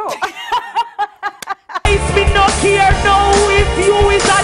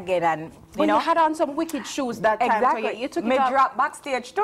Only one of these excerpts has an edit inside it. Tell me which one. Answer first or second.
first